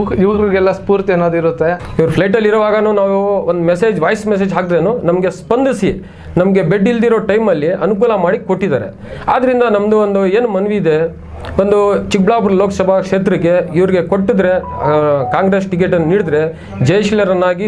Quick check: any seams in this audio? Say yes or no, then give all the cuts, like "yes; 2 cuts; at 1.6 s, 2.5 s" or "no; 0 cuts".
yes; 1 cut; at 1.8 s